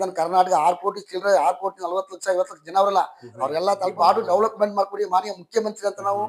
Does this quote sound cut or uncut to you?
cut